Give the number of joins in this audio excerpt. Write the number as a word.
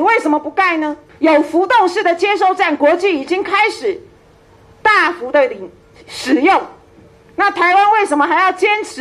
one